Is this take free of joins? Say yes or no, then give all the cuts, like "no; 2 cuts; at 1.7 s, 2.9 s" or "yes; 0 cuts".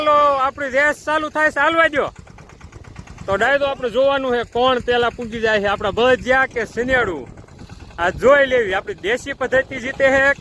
yes; 0 cuts